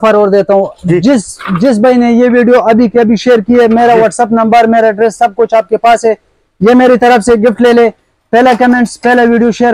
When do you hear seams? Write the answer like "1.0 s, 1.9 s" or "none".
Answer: none

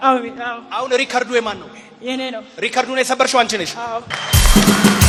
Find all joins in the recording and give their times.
none

